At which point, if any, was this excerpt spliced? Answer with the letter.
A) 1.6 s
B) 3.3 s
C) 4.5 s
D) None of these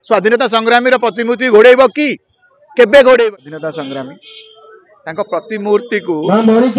B